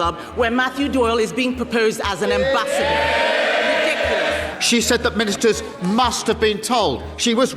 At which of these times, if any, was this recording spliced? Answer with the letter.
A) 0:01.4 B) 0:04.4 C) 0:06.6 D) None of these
B